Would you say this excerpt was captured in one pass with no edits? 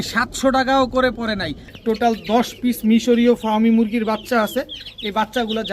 no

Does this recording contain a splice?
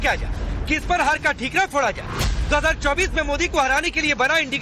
yes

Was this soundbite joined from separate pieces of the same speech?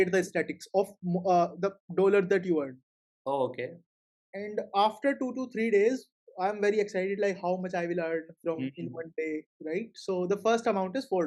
no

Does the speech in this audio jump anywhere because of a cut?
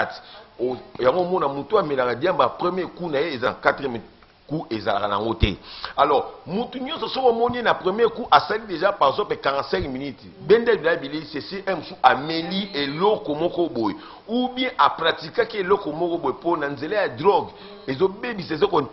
yes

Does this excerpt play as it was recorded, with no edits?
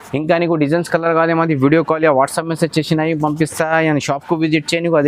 yes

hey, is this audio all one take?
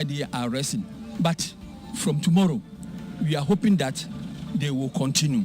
no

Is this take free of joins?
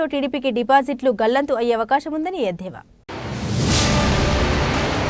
yes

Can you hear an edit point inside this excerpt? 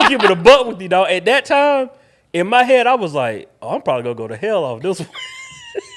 no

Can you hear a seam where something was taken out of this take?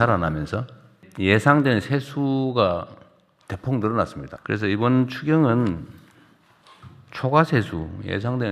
yes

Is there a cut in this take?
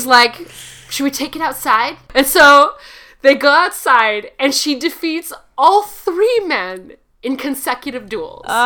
yes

